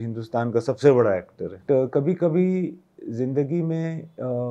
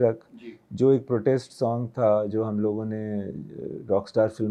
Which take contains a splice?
first; 1 cut; at 1.6 s

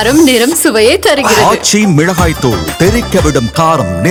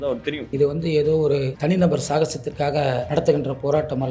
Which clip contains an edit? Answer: second; 2 cuts; at 1.5 s, 3.1 s

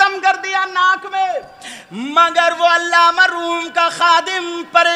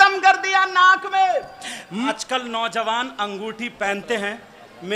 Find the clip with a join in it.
second; 1 cut; at 2.1 s

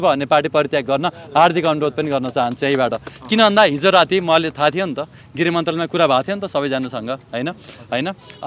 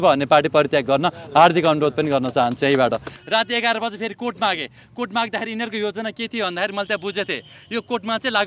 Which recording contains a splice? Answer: second; 1 cut; at 3.1 s

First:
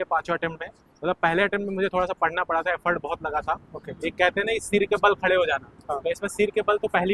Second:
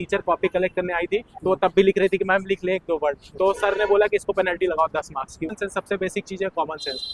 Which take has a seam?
second; 1 cut; at 5.5 s

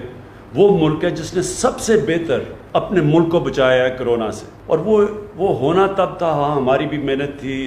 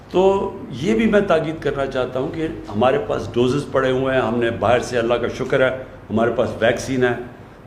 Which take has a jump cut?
first; 2 cuts; at 2.6 s, 4.5 s

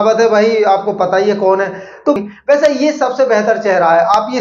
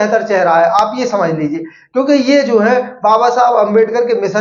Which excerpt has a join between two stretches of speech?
first; 1 cut; at 2.2 s

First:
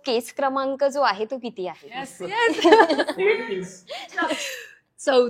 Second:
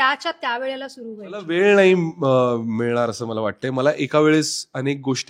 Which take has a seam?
second; 1 cut; at 1.4 s

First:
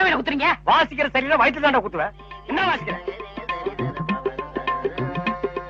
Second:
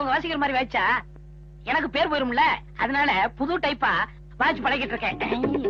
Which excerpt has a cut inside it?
first; 1 cut; at 3.8 s

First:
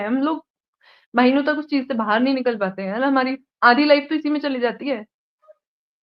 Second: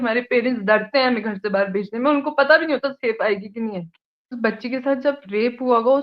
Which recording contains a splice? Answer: second; 1 cut; at 4.3 s

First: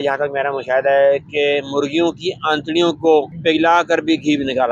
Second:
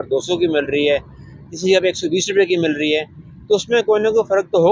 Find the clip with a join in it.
first; 1 cut; at 3.3 s

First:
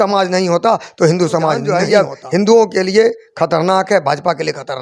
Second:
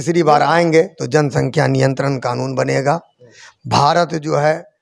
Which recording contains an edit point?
first; 1 cut; at 1.6 s

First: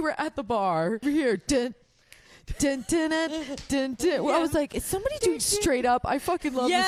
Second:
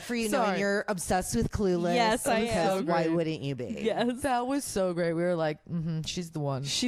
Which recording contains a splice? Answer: first; 1 cut; at 1.0 s

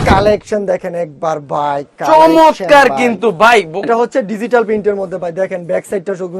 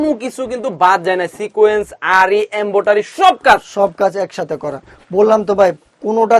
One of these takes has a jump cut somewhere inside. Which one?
first; 1 cut; at 3.9 s

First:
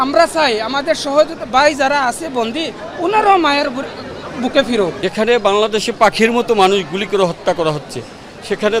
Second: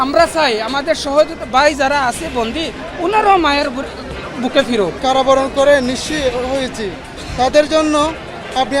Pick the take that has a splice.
second; 1 cut; at 4.9 s

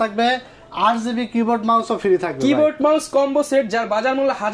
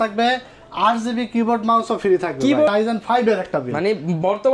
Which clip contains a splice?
second; 1 cut; at 2.7 s

